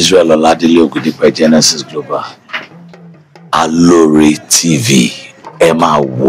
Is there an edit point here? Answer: no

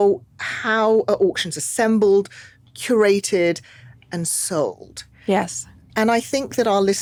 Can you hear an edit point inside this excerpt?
no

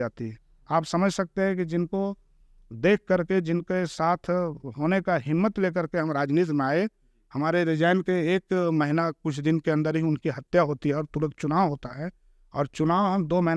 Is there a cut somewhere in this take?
no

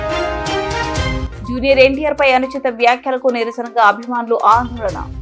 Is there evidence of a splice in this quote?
yes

